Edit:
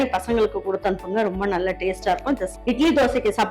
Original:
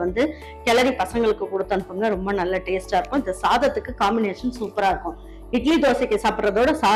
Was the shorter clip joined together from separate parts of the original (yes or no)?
yes